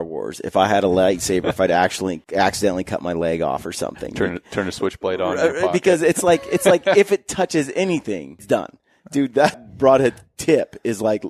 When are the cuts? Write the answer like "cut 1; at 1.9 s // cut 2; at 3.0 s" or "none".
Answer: cut 1; at 2.2 s // cut 2; at 8.4 s // cut 3; at 9.7 s